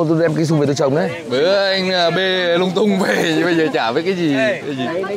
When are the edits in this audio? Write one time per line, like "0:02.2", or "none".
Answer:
none